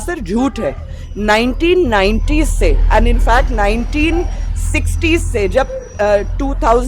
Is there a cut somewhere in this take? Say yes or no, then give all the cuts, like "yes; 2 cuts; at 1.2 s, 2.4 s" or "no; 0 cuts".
no; 0 cuts